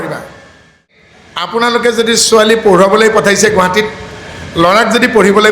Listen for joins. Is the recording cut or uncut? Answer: cut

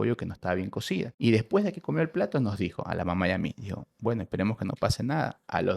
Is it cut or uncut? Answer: cut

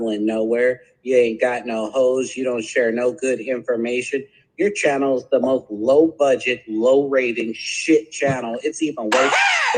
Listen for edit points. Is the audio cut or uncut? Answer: uncut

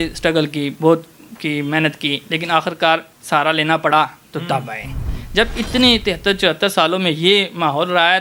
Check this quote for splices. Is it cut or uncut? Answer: uncut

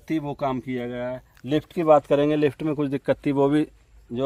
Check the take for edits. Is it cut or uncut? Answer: uncut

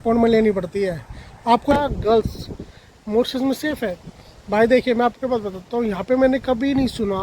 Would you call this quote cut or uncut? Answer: cut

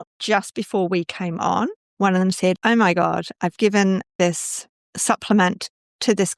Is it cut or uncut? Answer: cut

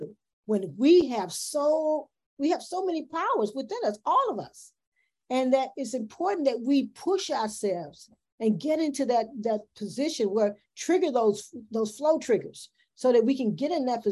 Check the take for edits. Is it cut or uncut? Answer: uncut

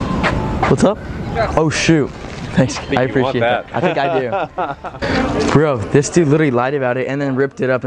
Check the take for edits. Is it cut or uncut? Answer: cut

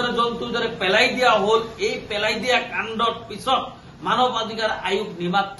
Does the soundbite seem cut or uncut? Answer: uncut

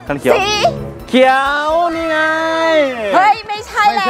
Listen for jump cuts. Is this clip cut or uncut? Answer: uncut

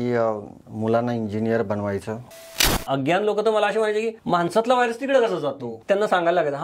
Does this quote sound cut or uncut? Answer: cut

